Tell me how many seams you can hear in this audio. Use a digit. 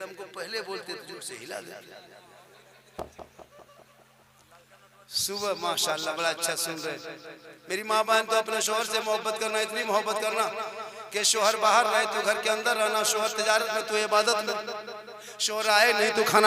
0